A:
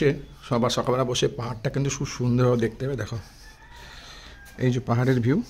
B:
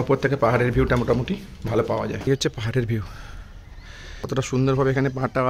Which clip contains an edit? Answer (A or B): B